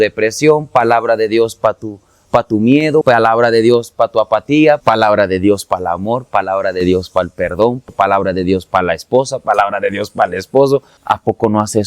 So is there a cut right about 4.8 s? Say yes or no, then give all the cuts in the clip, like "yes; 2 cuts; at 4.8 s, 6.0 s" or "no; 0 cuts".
yes; 4 cuts; at 3.0 s, 4.8 s, 7.8 s, 10.9 s